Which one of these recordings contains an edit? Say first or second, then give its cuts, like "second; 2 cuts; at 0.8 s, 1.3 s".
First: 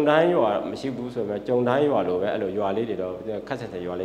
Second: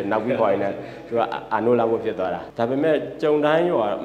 second; 1 cut; at 2.4 s